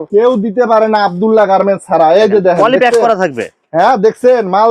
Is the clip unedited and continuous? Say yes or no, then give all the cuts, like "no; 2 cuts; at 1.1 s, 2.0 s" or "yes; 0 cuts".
yes; 0 cuts